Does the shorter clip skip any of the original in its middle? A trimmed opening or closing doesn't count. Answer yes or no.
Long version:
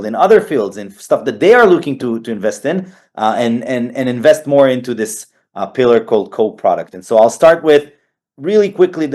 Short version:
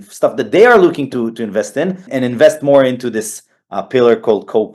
yes